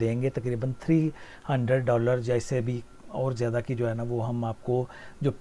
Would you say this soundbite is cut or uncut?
uncut